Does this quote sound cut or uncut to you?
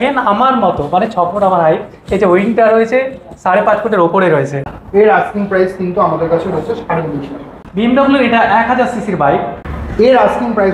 cut